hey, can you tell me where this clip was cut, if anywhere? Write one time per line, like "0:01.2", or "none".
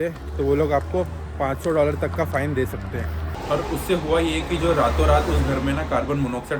0:03.3